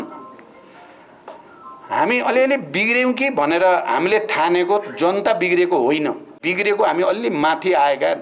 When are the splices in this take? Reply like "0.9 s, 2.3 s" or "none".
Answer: 6.4 s